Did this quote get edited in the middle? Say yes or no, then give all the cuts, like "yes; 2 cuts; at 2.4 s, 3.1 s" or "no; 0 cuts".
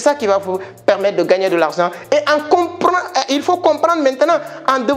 no; 0 cuts